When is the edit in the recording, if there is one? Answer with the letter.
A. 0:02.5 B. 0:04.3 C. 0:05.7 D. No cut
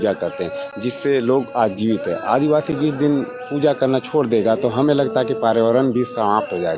D